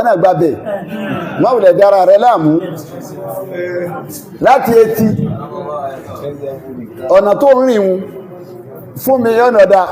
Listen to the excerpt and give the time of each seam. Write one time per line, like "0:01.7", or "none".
none